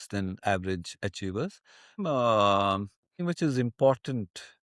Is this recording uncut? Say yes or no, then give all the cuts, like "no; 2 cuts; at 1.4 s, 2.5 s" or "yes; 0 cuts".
no; 2 cuts; at 2.0 s, 3.2 s